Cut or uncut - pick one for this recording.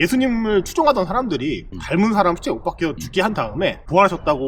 uncut